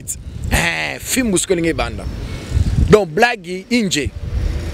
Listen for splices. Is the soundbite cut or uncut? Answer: uncut